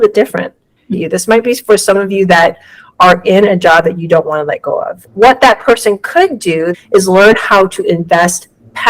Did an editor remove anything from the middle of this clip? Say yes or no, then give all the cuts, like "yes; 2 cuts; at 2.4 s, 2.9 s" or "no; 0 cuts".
yes; 3 cuts; at 0.8 s, 4.9 s, 6.7 s